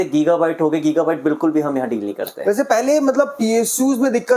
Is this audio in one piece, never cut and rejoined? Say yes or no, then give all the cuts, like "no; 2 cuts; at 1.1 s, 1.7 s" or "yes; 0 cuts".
yes; 0 cuts